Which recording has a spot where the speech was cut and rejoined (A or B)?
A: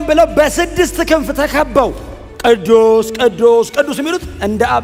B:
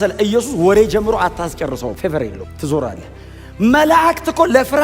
B